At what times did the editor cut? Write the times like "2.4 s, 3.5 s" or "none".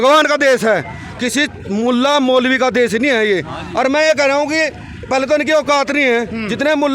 none